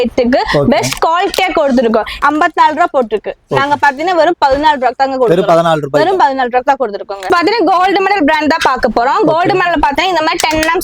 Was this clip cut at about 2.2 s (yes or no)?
yes